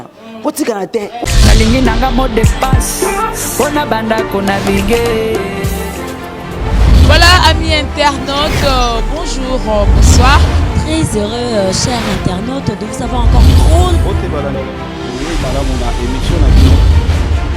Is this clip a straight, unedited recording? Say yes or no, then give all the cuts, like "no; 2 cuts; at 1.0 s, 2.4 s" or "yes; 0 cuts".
no; 1 cut; at 1.2 s